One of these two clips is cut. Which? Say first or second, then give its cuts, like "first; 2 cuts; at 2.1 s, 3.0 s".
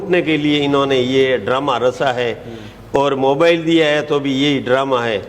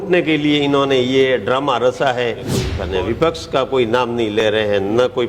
second; 1 cut; at 2.8 s